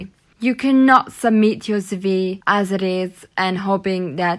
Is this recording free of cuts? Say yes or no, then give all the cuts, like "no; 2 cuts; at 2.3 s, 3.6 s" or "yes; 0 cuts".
no; 1 cut; at 2.4 s